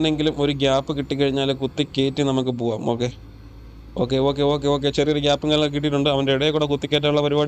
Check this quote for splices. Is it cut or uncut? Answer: uncut